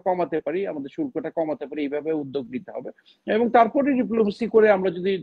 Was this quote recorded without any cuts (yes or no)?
yes